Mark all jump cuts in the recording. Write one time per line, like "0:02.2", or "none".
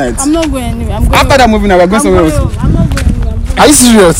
none